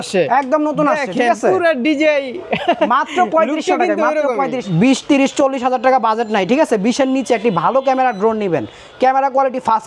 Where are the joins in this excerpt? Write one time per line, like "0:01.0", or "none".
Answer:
0:04.6